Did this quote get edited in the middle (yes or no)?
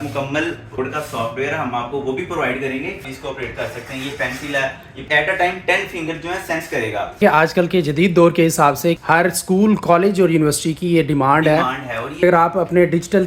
yes